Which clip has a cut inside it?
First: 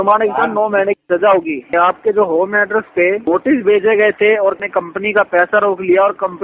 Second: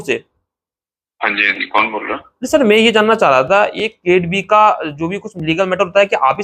first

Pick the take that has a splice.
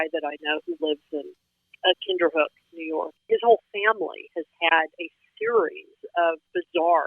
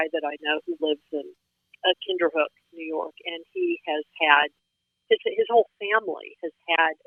first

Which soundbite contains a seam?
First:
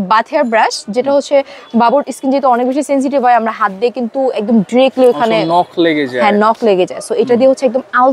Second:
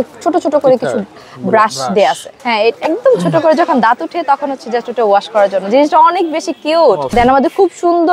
second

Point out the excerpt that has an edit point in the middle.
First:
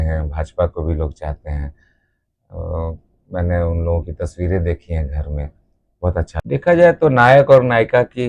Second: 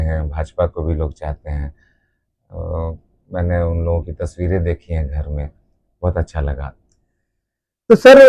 first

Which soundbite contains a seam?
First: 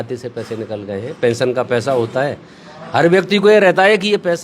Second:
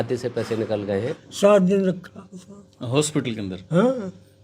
second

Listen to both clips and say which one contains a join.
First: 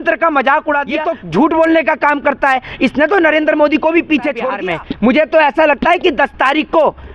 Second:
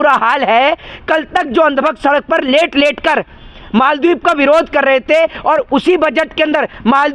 first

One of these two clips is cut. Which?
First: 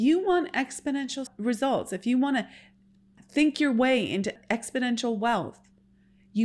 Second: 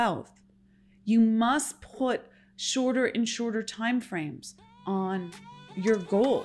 first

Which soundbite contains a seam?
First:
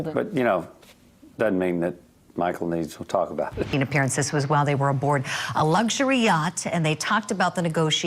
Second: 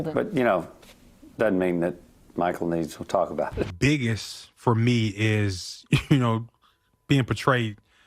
second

